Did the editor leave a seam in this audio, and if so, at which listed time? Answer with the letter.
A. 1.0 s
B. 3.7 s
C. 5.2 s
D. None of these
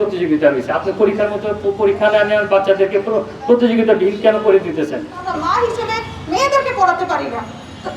C